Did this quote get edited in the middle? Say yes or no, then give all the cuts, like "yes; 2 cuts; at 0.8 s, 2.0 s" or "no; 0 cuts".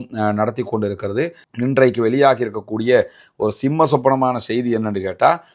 yes; 1 cut; at 1.5 s